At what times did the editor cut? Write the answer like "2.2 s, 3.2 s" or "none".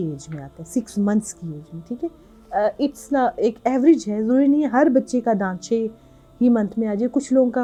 none